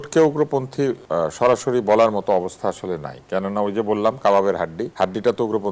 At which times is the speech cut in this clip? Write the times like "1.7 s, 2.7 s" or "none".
1.0 s, 4.8 s